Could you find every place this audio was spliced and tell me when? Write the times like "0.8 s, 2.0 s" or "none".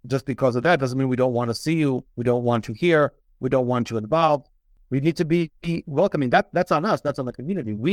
none